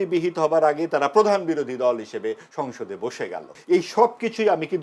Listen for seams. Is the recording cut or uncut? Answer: cut